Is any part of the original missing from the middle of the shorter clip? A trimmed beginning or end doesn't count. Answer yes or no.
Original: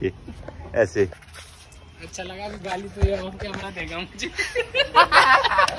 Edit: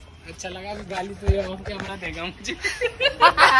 no